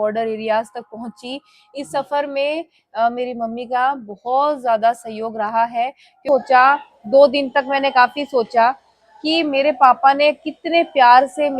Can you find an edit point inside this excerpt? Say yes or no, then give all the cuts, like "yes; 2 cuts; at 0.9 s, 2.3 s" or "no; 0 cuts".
yes; 1 cut; at 6.2 s